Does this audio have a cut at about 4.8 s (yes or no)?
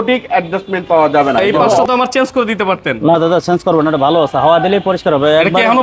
no